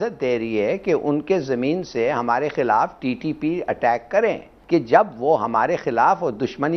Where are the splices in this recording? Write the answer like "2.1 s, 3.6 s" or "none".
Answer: 4.5 s

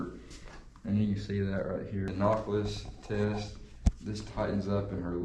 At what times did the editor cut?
2.1 s

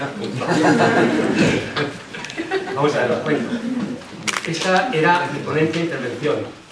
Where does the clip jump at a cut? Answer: none

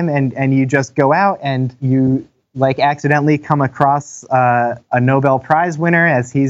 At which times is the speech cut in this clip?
1.8 s, 4.8 s

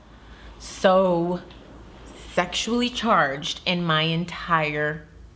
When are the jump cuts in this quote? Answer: none

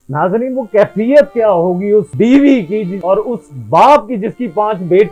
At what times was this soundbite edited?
2.1 s, 2.9 s

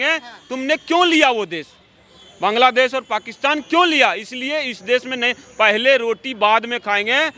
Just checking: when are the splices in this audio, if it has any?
none

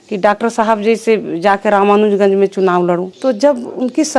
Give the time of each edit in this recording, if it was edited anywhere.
3.1 s

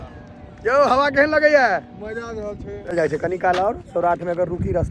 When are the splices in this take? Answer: 2.9 s

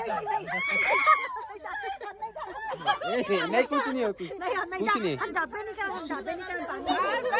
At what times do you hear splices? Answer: none

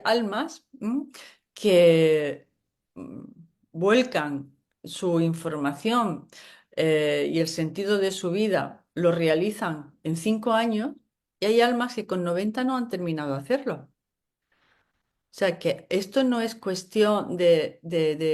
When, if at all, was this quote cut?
none

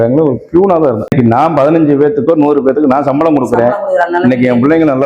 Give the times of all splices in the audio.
1.1 s

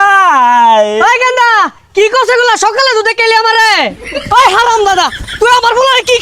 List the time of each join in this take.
3.9 s

